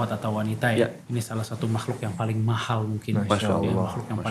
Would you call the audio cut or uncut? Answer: cut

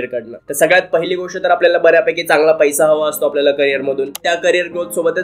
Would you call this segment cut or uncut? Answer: cut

